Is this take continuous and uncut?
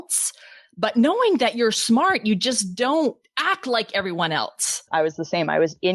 no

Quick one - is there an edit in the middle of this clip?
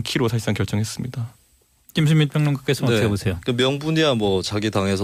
no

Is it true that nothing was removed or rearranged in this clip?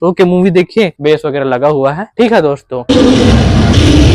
no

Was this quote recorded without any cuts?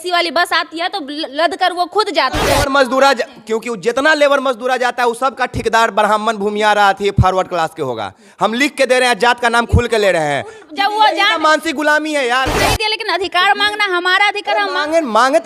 no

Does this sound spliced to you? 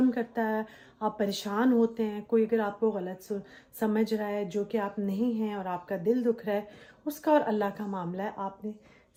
no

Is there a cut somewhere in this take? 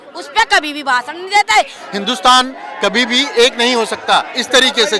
yes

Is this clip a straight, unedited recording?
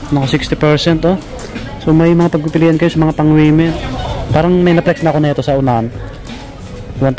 no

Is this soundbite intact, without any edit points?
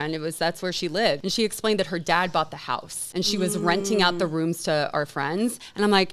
no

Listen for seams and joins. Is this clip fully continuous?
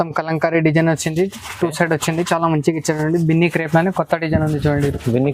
yes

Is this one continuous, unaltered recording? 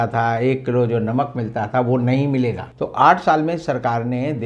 no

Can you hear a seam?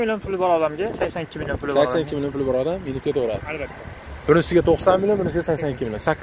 no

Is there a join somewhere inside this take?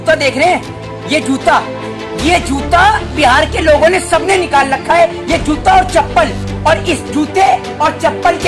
no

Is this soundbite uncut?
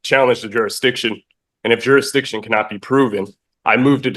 yes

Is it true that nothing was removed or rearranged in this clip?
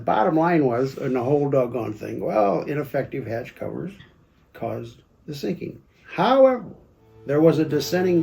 no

